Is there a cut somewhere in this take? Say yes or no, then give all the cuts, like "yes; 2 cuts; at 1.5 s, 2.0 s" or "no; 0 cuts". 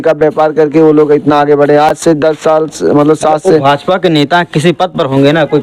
no; 0 cuts